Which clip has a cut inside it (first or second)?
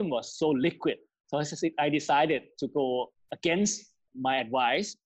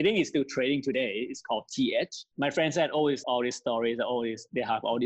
first